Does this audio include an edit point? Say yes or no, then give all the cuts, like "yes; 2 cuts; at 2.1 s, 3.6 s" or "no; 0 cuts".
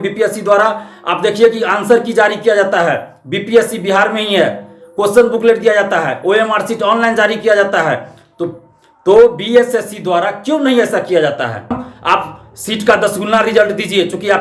yes; 1 cut; at 11.9 s